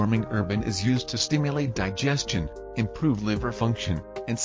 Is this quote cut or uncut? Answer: uncut